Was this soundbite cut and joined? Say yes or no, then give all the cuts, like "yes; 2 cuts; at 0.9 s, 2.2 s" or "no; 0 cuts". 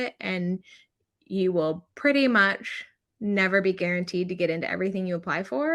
no; 0 cuts